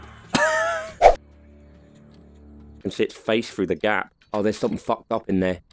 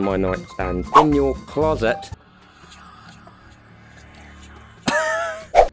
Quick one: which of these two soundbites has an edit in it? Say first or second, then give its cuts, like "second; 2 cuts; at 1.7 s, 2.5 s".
first; 1 cut; at 2.7 s